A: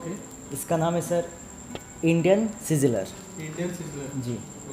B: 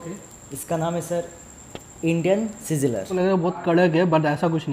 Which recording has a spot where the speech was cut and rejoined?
B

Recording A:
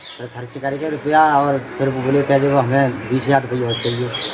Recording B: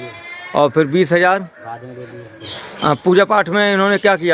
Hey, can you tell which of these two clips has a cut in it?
B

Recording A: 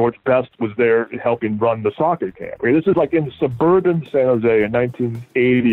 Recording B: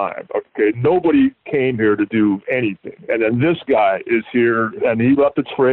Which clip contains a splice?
B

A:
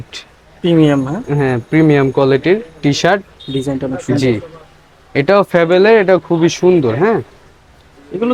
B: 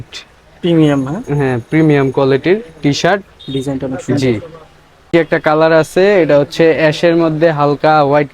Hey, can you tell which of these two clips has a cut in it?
B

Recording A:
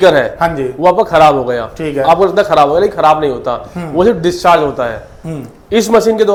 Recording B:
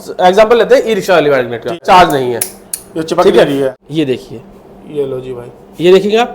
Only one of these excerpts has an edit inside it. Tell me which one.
B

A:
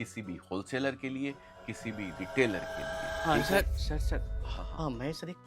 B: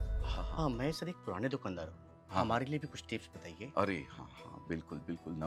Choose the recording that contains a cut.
A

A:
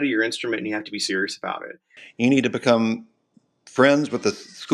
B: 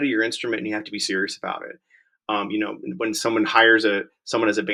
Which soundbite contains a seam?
A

